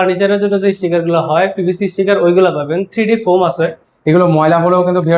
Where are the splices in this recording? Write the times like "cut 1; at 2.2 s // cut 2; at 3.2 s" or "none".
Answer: cut 1; at 3.9 s